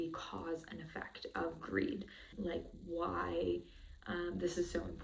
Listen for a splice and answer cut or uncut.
cut